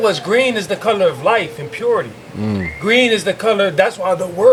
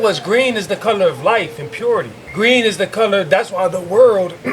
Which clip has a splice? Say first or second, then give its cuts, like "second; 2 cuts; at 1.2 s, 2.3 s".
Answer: second; 1 cut; at 2.2 s